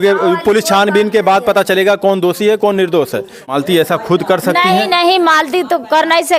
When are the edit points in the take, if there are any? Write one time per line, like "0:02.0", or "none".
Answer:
0:03.5